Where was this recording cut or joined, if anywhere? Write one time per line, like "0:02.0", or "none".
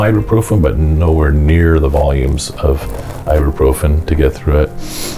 none